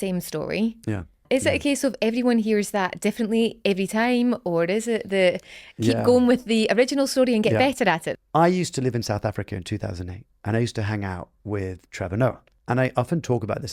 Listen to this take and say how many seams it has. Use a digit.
3